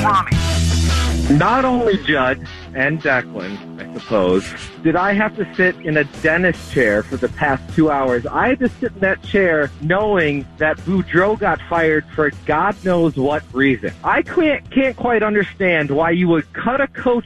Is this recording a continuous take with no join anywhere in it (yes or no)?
no